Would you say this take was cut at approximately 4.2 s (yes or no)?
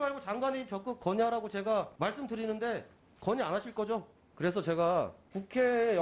yes